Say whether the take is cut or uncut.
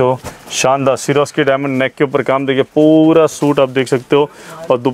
uncut